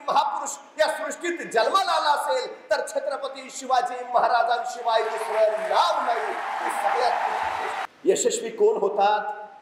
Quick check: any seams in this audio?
yes; 1 cut; at 7.8 s

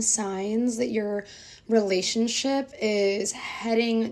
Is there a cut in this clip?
no; 0 cuts

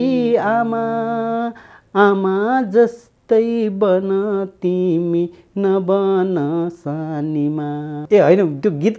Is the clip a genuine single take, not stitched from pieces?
no; 1 cut; at 8.0 s

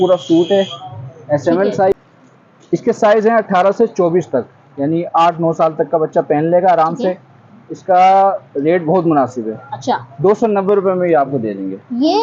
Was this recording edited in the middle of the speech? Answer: yes; 1 cut; at 1.9 s

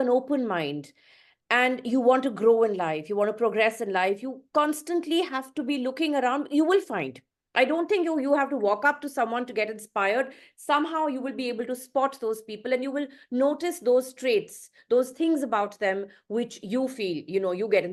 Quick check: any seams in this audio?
no; 0 cuts

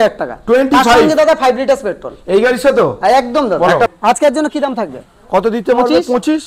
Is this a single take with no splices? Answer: no; 1 cut; at 3.7 s

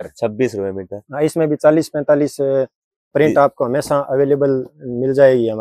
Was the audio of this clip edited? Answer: no; 0 cuts

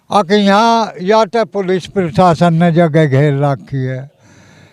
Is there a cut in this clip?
no; 0 cuts

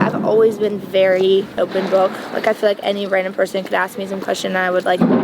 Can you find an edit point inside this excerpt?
yes; 1 cut; at 1.5 s

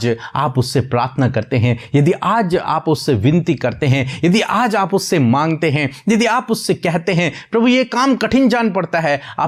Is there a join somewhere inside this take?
no; 0 cuts

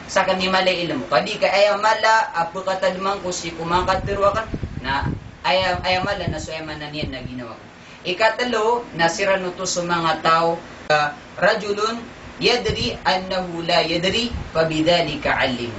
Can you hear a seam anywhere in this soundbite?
yes; 1 cut; at 10.9 s

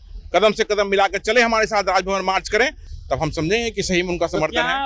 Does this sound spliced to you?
no; 0 cuts

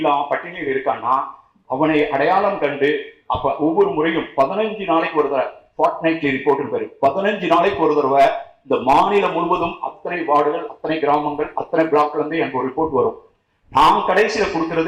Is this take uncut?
yes; 0 cuts

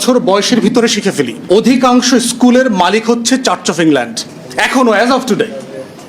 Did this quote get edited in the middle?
yes; 1 cut; at 1.4 s

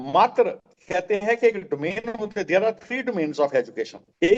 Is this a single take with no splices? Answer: yes; 0 cuts

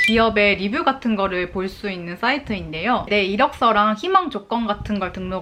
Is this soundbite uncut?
yes; 0 cuts

